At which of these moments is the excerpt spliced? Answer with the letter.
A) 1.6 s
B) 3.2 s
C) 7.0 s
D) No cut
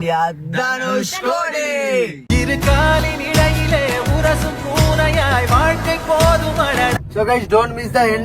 C